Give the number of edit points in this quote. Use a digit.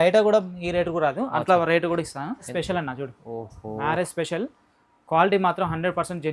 1